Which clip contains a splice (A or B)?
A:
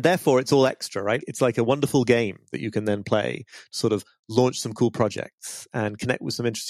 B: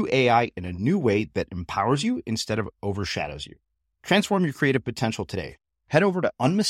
A